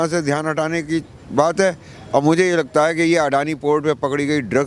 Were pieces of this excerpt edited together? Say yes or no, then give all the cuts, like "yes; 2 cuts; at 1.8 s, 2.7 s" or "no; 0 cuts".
no; 0 cuts